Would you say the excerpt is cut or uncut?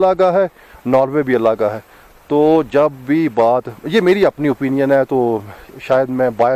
uncut